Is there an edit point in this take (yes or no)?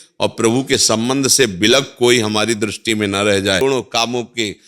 yes